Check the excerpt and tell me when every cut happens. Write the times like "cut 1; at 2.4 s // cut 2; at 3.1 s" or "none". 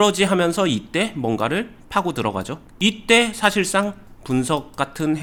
none